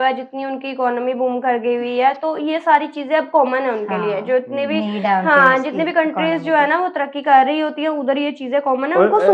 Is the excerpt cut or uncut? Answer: uncut